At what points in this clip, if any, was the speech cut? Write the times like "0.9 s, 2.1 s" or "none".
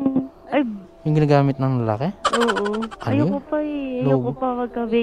2.9 s